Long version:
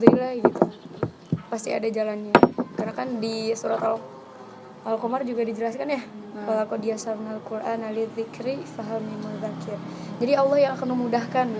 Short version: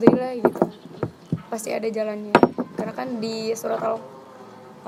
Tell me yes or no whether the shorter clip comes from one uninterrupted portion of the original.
yes